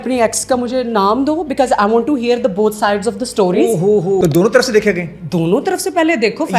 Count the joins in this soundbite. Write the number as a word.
one